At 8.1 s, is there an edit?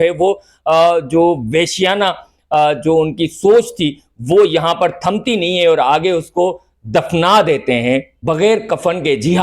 yes; 1 cut; at 8.1 s

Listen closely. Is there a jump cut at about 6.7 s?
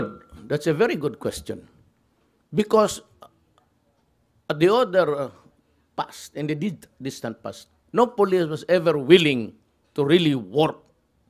yes; 1 cut; at 6.7 s

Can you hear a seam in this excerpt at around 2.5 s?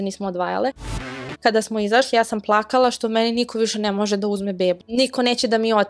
no; 2 cuts; at 1.2 s, 4.9 s

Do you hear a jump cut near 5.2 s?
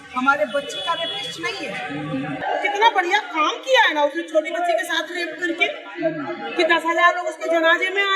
no; 1 cut; at 2.4 s

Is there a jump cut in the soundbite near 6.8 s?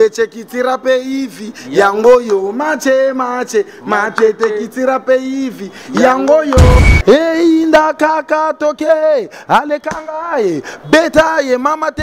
yes; 1 cut; at 6.8 s

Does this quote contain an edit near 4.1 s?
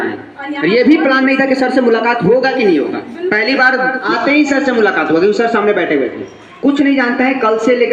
yes; 1 cut; at 4.1 s

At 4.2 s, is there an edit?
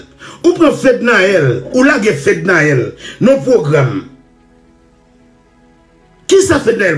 yes; 2 cuts; at 4.2 s, 6.3 s

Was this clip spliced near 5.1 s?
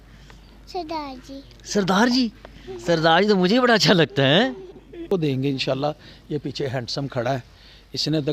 yes; 1 cut; at 5.1 s

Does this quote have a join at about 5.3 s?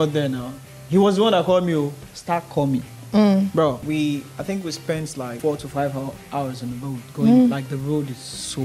yes; 2 cuts; at 3.8 s, 5.3 s

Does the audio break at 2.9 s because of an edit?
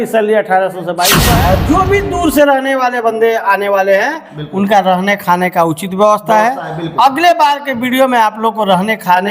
no; 1 cut; at 1.2 s

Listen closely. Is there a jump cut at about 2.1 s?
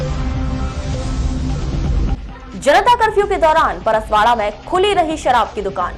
yes; 1 cut; at 2.1 s

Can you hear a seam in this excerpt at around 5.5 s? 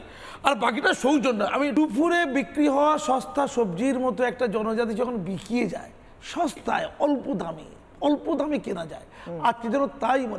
no; 1 cut; at 1.7 s

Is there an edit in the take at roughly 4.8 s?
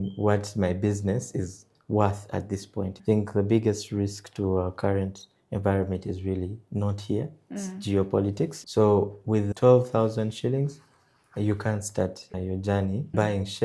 no; 2 cuts; at 2.9 s, 8.6 s

